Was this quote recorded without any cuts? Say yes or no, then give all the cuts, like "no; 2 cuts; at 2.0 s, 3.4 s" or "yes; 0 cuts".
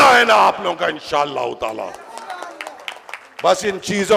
yes; 0 cuts